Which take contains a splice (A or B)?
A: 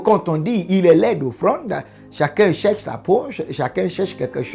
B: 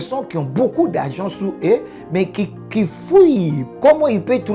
B